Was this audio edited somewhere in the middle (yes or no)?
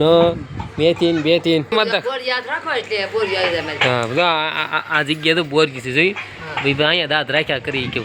no